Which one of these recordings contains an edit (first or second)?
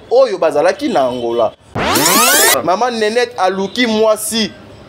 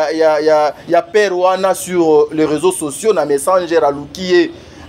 first